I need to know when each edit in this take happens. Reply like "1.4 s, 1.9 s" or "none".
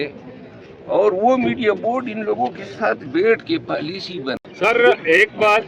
4.4 s